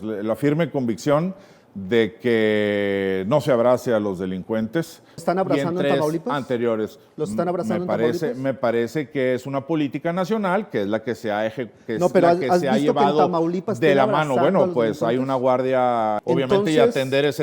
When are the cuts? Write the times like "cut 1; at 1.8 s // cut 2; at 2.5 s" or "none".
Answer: cut 1; at 5.2 s // cut 2; at 16.2 s